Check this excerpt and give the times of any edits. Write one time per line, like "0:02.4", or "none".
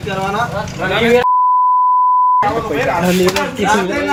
none